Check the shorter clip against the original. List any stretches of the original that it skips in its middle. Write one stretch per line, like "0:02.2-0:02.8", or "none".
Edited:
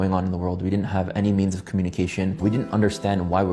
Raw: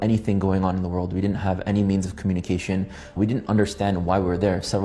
0:02.9-0:03.1